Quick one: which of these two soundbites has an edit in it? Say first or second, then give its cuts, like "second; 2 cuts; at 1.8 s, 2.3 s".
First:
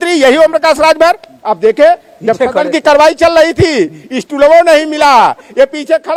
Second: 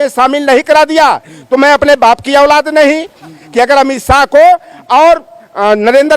second; 1 cut; at 3.4 s